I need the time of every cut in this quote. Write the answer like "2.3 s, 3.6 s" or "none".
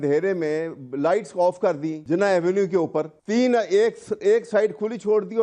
1.9 s, 3.2 s